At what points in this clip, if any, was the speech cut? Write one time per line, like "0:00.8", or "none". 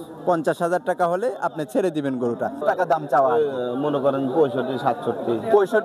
0:02.6